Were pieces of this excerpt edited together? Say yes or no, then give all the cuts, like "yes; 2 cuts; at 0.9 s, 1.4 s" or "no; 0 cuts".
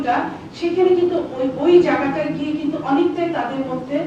no; 0 cuts